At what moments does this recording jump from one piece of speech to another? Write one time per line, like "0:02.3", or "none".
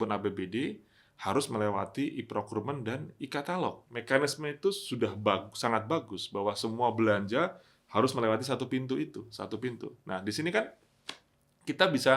0:03.9